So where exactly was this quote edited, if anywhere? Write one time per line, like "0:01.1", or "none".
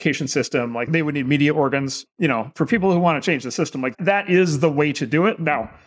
0:03.9